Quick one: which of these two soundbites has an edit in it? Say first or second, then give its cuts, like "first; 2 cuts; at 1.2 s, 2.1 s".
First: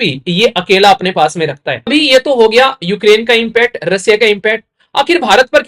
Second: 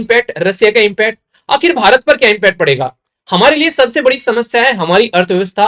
first; 1 cut; at 1.9 s